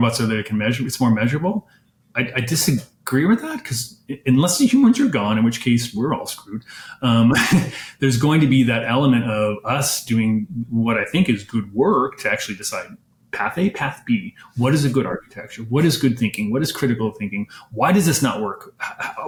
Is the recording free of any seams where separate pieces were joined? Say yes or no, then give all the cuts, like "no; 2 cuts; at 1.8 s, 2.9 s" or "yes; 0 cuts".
yes; 0 cuts